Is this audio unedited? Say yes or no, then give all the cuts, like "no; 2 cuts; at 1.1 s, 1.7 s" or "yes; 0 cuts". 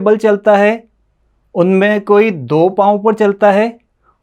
yes; 0 cuts